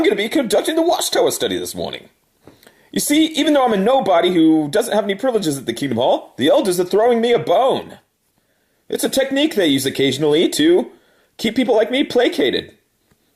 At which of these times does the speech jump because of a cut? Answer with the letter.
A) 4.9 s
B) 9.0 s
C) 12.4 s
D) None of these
B